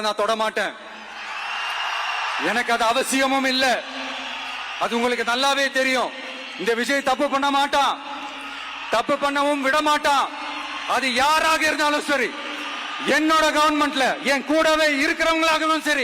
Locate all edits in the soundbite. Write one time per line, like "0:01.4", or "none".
none